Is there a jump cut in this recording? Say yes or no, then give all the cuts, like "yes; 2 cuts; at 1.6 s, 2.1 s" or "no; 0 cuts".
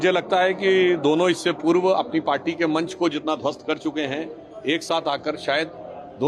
no; 0 cuts